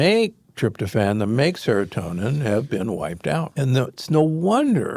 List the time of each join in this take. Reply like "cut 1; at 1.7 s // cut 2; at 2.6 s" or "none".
cut 1; at 3.5 s